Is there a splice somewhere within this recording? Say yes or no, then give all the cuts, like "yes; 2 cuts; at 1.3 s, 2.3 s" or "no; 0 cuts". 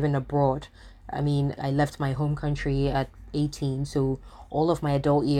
no; 0 cuts